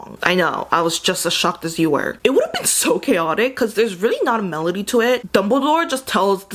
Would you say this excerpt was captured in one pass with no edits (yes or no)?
yes